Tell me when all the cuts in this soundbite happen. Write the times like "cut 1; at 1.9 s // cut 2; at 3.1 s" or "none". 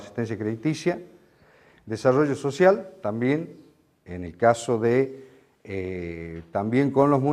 none